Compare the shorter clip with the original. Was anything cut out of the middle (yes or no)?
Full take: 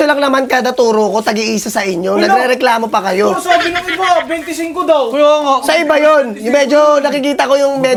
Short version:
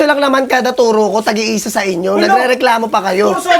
no